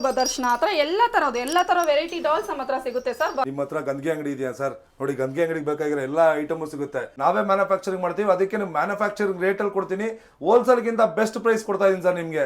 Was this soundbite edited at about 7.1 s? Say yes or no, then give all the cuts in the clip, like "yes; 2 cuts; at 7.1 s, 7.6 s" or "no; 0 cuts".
yes; 2 cuts; at 3.5 s, 7.1 s